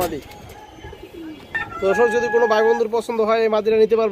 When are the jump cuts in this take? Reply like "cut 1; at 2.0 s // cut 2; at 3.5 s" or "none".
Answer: none